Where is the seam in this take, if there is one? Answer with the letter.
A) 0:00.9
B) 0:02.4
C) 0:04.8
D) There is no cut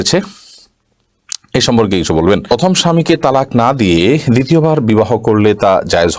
B